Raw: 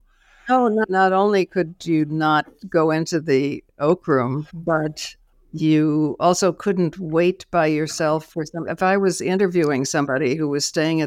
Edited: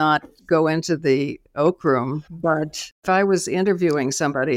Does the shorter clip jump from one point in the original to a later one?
yes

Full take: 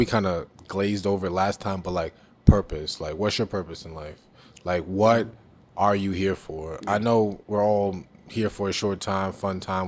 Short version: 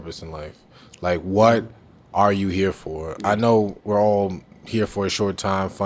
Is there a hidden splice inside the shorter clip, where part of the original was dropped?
no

